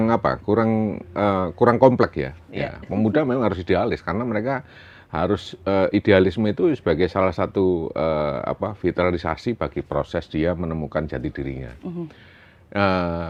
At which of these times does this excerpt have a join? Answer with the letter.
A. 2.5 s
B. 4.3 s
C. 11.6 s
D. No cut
D